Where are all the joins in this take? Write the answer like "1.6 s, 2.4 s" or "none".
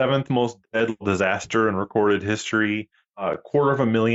none

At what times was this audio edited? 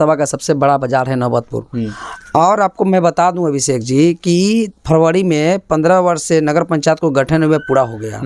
none

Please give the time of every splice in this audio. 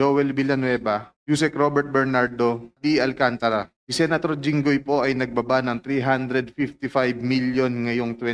1.1 s, 2.7 s, 3.8 s

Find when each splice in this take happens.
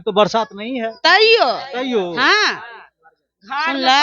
none

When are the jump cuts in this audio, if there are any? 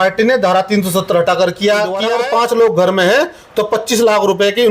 2.1 s

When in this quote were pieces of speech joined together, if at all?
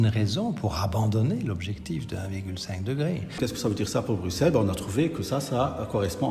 3.4 s

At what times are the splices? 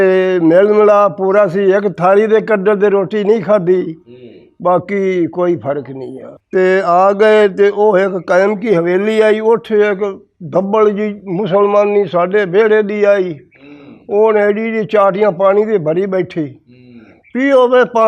6.4 s

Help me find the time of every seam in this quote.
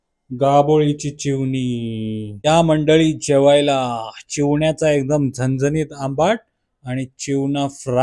2.4 s

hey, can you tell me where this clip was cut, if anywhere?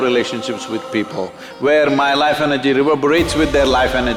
none

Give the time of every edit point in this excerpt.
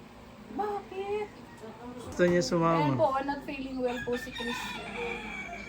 2.1 s

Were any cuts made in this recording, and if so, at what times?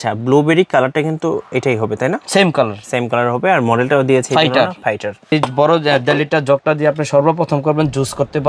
5.3 s

